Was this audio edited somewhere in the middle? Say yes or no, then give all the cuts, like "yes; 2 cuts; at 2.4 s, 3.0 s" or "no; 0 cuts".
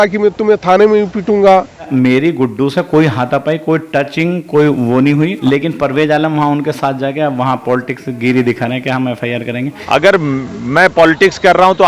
yes; 3 cuts; at 1.9 s, 5.4 s, 9.7 s